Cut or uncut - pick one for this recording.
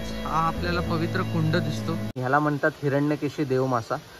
cut